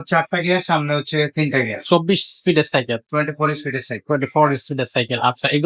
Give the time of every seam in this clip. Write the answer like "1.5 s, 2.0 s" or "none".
none